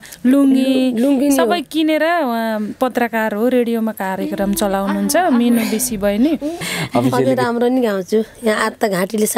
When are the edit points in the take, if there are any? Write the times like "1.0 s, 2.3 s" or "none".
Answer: 6.6 s